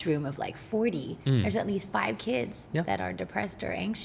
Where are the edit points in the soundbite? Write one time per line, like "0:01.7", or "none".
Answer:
none